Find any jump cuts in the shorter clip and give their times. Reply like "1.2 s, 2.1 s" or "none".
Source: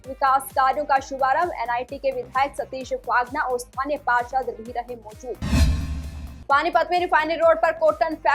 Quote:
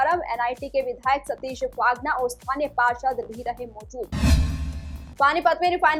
none